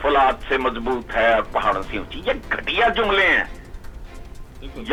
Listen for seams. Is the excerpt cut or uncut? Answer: uncut